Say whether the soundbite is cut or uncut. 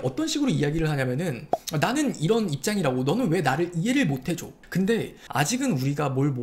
cut